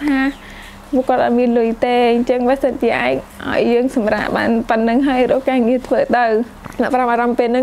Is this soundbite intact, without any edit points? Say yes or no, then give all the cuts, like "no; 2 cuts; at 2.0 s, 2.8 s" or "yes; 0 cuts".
no; 1 cut; at 6.6 s